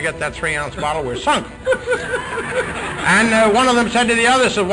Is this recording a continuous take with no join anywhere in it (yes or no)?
yes